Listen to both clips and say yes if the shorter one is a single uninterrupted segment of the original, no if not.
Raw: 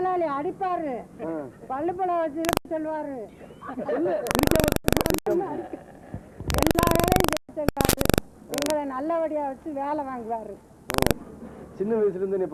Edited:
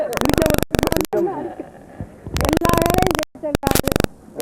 yes